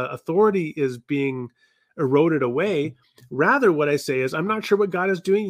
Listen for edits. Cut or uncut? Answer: uncut